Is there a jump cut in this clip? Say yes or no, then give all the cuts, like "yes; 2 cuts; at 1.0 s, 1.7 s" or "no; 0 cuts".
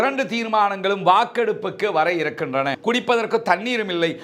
yes; 1 cut; at 2.8 s